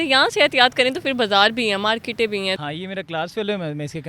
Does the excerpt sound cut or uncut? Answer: cut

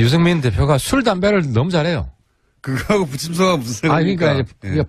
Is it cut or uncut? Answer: cut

